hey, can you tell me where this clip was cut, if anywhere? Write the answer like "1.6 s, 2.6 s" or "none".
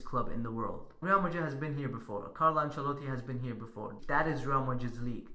0.9 s, 4.0 s